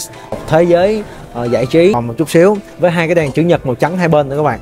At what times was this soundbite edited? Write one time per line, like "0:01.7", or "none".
0:02.0